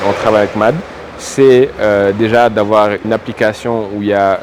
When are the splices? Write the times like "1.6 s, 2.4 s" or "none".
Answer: none

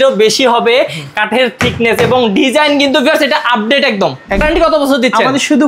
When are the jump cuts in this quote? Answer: 4.4 s

